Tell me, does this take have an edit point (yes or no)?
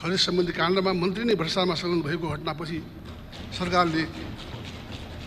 no